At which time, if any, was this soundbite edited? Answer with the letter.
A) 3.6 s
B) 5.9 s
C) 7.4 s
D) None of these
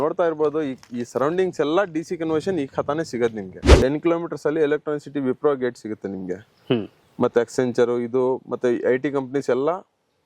A